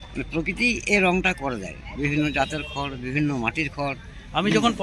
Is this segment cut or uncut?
uncut